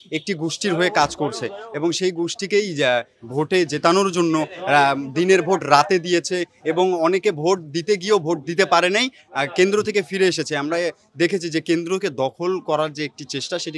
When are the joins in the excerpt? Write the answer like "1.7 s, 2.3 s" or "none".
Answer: none